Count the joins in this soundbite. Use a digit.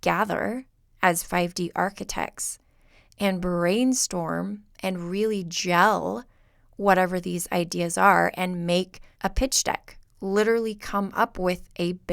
1